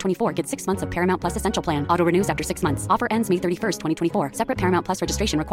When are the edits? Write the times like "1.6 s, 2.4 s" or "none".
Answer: none